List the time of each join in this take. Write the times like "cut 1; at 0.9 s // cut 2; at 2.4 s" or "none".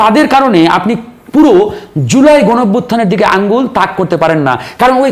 none

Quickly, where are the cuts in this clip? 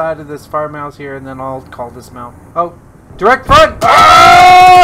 cut 1; at 2.4 s // cut 2; at 3.8 s

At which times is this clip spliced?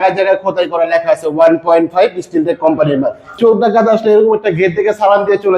cut 1; at 3.4 s

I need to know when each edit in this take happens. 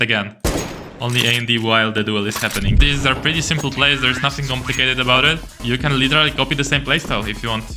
cut 1; at 2.8 s // cut 2; at 5.6 s

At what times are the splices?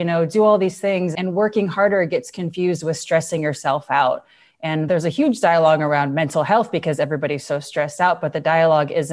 cut 1; at 1.1 s // cut 2; at 4.8 s

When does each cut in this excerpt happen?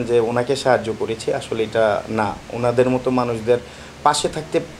none

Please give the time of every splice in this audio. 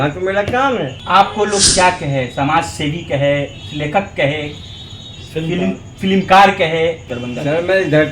cut 1; at 1.0 s // cut 2; at 7.1 s

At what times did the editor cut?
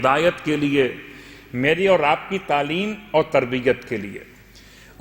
none

